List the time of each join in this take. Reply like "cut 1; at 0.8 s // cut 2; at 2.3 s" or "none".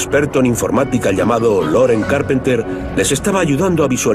cut 1; at 1.0 s